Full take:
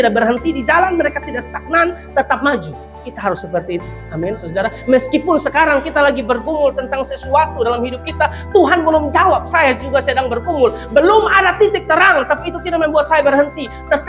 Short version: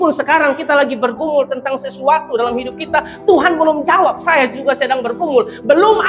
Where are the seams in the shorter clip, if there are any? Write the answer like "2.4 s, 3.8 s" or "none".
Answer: none